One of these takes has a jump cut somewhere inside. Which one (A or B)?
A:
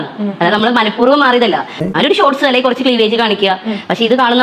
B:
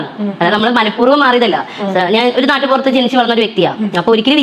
A